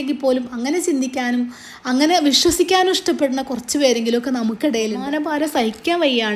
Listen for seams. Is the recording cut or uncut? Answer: cut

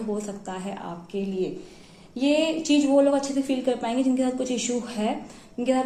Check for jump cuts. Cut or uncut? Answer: uncut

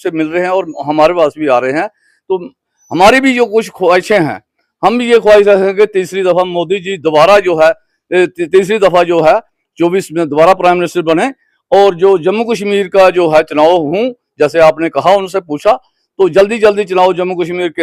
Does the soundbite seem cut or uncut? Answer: uncut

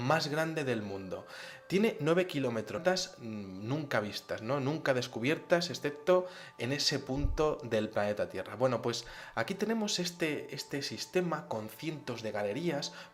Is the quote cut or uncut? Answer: uncut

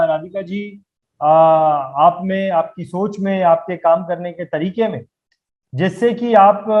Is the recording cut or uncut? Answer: uncut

